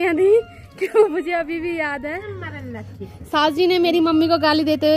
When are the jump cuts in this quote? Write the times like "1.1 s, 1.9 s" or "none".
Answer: 2.3 s